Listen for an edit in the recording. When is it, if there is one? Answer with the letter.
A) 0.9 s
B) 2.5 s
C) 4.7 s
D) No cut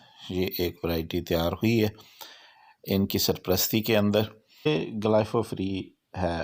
C